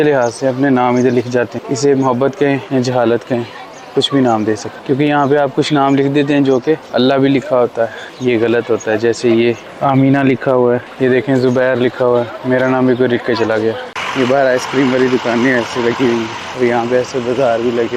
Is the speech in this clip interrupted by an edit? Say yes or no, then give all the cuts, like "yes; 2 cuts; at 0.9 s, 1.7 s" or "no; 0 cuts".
yes; 9 cuts; at 1.6 s, 2.6 s, 4.7 s, 6.8 s, 8.0 s, 9.7 s, 10.9 s, 13.9 s, 16.4 s